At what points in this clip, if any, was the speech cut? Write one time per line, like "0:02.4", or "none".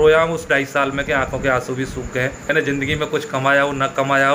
0:02.5